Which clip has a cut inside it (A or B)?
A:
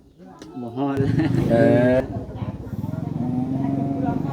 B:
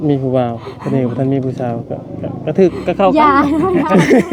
A